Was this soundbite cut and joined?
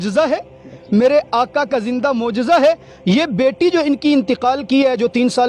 no; 0 cuts

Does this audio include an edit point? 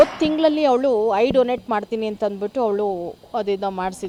no; 0 cuts

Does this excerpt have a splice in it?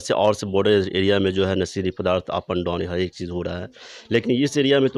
no; 0 cuts

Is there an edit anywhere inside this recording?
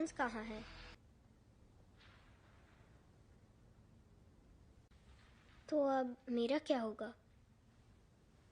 yes; 1 cut; at 1.0 s

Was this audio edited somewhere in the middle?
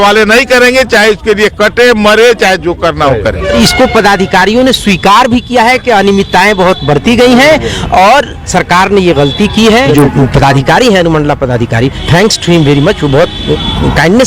yes; 2 cuts; at 3.5 s, 9.9 s

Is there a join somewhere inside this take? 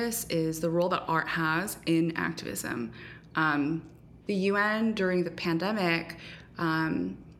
no; 0 cuts

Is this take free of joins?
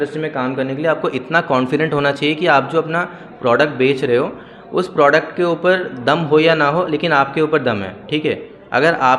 yes; 0 cuts

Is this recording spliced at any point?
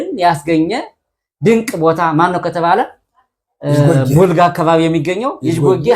no; 0 cuts

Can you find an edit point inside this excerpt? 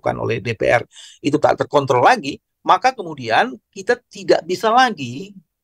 no; 0 cuts

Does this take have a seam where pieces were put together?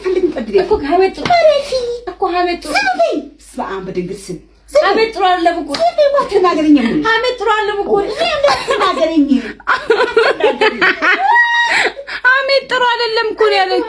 no; 0 cuts

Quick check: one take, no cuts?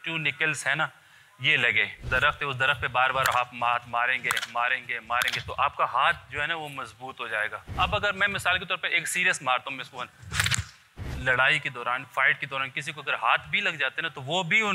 no; 3 cuts; at 2.0 s, 7.7 s, 11.1 s

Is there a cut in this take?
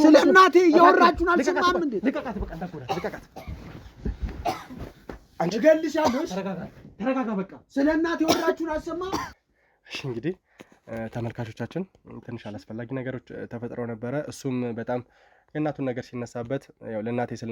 no; 0 cuts

